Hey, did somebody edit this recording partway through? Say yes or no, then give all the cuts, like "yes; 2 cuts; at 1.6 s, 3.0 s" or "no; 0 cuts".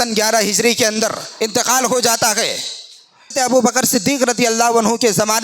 yes; 2 cuts; at 1.2 s, 3.3 s